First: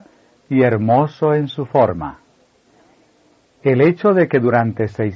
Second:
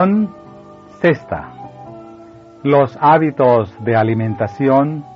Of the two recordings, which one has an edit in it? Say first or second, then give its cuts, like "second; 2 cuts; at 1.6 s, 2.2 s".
first; 1 cut; at 1.3 s